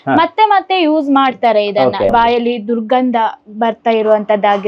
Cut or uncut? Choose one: cut